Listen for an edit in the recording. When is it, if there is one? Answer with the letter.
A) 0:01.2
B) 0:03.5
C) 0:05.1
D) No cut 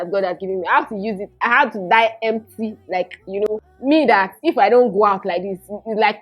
B